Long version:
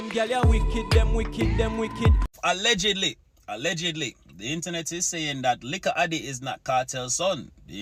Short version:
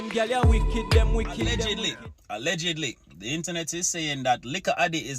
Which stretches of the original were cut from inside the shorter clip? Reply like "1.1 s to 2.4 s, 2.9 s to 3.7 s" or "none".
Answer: 1.7 s to 2.9 s

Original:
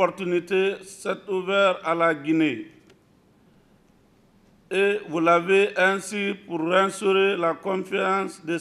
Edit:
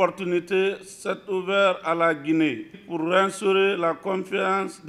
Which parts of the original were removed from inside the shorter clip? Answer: 2.8 s to 6.4 s

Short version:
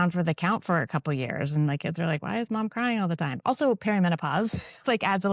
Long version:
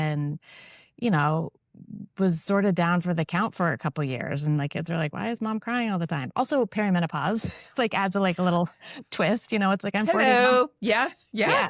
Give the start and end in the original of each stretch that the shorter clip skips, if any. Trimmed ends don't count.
none

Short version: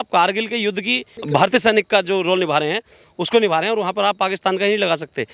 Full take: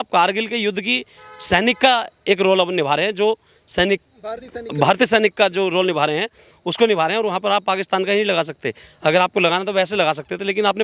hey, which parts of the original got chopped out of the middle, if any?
1.1 s to 4.6 s

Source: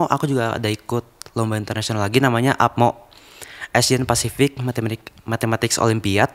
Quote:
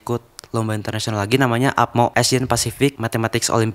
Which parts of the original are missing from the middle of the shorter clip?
2.9 s to 3.7 s, 4.6 s to 5.3 s

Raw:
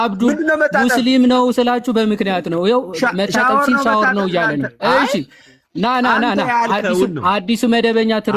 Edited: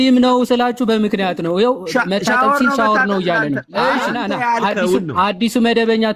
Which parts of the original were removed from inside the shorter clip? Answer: 5.2 s to 6.2 s

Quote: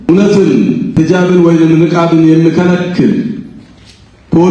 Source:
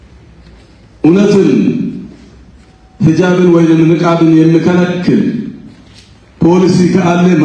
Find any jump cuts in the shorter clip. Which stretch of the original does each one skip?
1.9 s to 3.0 s

